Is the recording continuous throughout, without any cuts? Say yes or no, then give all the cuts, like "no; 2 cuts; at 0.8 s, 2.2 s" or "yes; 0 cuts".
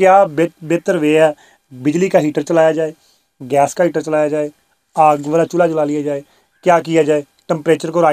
yes; 0 cuts